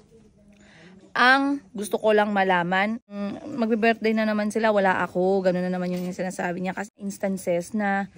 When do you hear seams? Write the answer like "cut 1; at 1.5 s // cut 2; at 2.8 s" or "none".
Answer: cut 1; at 3.1 s // cut 2; at 6.9 s

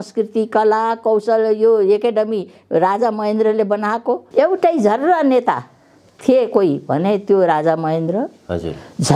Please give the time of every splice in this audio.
cut 1; at 4.2 s

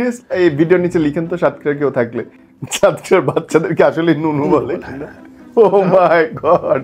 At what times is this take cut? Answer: none

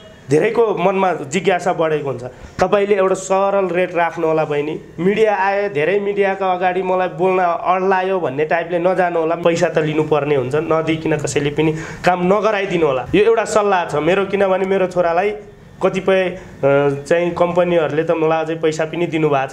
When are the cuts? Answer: cut 1; at 4.9 s // cut 2; at 9.4 s // cut 3; at 13.0 s

